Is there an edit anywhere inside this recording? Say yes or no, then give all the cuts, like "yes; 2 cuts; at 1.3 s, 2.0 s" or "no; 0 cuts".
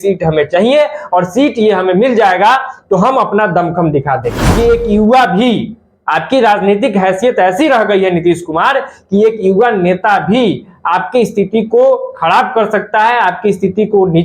yes; 1 cut; at 4.4 s